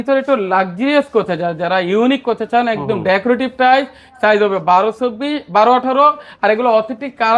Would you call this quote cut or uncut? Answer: uncut